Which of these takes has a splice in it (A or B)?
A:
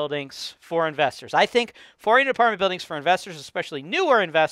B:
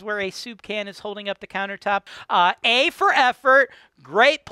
B